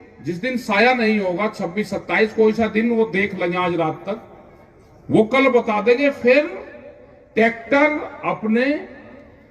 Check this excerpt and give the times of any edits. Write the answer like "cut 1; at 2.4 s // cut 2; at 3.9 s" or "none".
none